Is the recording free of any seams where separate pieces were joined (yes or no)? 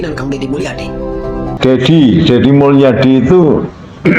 no